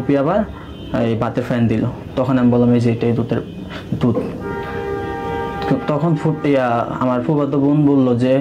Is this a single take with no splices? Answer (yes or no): yes